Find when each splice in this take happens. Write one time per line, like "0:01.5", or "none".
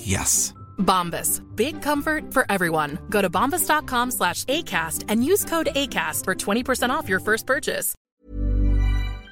0:08.0